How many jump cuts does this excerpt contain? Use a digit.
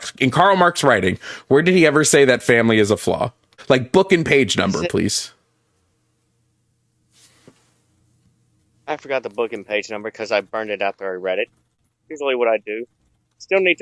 2